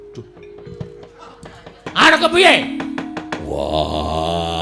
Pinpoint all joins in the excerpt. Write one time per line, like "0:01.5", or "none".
0:01.9